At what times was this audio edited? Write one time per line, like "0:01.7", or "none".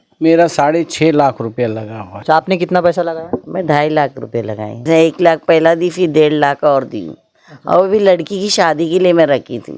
0:02.2
0:04.8